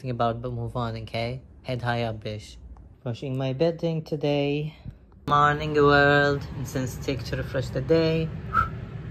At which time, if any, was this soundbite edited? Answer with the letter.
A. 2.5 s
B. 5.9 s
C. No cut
C